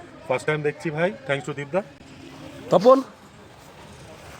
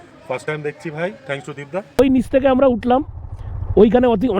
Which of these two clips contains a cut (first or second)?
second